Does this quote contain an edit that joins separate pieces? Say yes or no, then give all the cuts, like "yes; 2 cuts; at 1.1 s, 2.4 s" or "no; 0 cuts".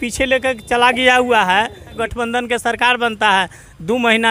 yes; 1 cut; at 2.0 s